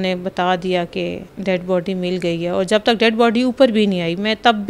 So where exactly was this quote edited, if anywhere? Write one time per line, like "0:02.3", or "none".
0:01.3